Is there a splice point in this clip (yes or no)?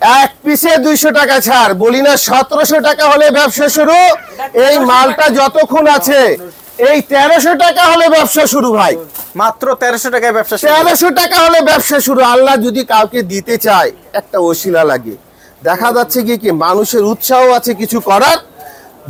no